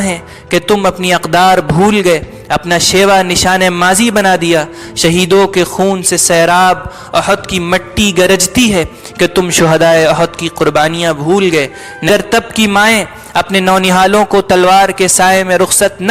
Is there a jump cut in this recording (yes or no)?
yes